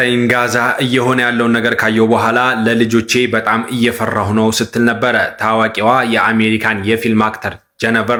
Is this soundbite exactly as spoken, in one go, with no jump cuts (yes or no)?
yes